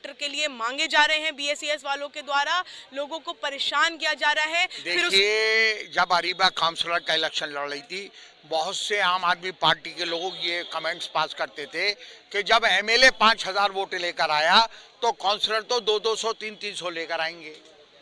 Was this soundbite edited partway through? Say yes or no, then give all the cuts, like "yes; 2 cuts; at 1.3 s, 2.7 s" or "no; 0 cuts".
yes; 1 cut; at 5.1 s